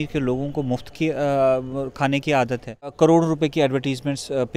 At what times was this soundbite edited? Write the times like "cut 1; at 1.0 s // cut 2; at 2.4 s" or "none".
cut 1; at 2.9 s